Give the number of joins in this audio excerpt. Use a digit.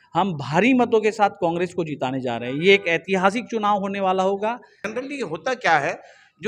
1